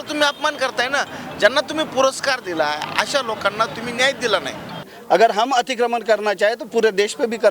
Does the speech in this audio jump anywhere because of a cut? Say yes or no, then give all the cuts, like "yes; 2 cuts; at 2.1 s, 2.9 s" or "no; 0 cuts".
yes; 1 cut; at 4.9 s